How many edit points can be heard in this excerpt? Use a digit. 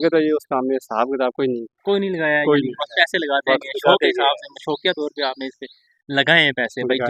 0